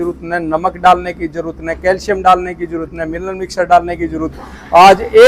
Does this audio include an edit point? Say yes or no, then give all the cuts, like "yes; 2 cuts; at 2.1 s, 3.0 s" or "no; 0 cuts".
no; 0 cuts